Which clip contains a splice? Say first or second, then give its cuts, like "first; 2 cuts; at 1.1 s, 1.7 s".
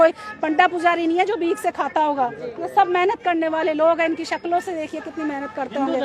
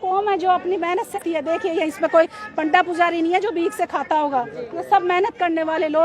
second; 1 cut; at 1.2 s